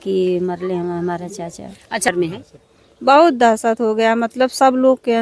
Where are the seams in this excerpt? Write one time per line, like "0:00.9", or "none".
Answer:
0:02.1